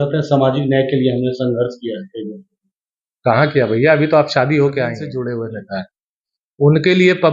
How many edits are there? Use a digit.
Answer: 1